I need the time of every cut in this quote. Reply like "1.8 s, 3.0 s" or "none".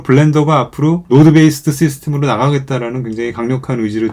1.0 s